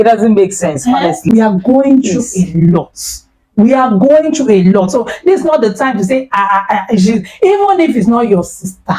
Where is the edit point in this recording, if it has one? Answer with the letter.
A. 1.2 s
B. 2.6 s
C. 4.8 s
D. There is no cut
A